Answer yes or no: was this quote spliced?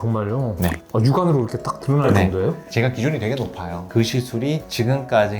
yes